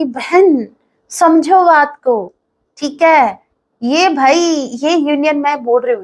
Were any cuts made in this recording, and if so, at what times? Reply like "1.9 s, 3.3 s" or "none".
none